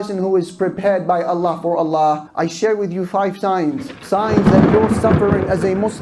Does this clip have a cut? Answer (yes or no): no